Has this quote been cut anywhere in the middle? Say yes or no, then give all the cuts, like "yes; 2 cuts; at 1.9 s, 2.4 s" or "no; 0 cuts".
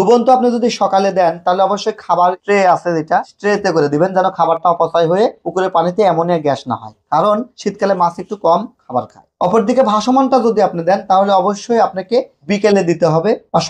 yes; 3 cuts; at 2.4 s, 3.3 s, 9.2 s